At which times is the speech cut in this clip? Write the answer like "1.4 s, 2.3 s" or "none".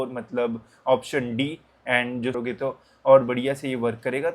2.4 s